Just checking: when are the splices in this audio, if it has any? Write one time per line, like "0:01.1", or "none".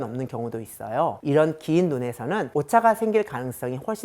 0:02.5